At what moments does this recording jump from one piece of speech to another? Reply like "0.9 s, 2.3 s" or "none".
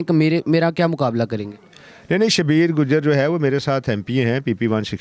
none